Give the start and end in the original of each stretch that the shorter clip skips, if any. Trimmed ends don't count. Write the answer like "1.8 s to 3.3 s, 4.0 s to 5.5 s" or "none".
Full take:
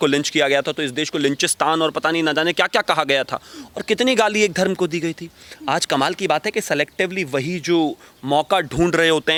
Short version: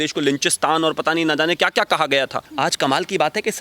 3.4 s to 5.5 s